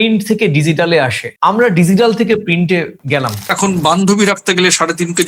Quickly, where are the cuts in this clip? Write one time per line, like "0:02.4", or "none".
0:03.5